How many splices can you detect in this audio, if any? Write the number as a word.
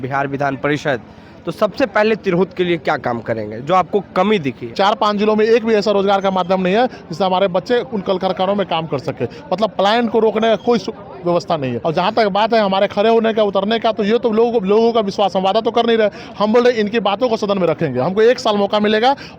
two